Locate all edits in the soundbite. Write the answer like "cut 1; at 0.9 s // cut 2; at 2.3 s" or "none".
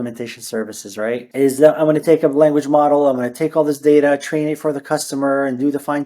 cut 1; at 1.3 s